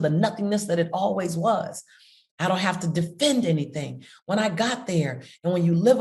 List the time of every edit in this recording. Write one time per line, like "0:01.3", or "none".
none